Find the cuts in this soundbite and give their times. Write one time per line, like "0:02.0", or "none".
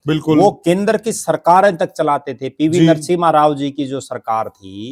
none